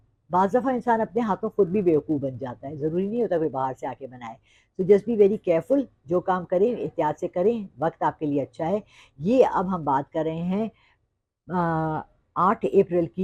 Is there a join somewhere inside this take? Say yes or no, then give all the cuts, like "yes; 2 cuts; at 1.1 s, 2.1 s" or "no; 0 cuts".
no; 0 cuts